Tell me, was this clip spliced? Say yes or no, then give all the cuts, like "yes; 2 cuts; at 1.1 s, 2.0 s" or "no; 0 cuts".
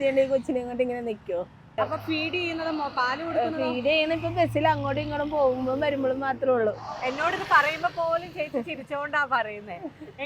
yes; 2 cuts; at 1.7 s, 6.8 s